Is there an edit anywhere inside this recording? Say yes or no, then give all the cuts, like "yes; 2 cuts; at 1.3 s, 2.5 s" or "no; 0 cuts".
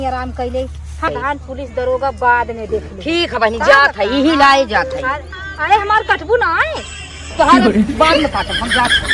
yes; 1 cut; at 1.1 s